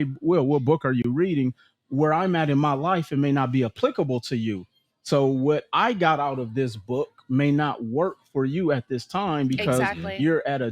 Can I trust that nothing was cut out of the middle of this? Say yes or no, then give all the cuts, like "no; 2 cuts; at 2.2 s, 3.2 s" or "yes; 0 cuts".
yes; 0 cuts